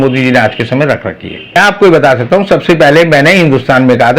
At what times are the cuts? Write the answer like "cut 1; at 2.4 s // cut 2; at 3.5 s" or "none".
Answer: cut 1; at 1.6 s